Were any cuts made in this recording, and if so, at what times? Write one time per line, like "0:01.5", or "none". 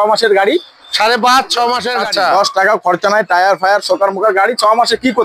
0:01.9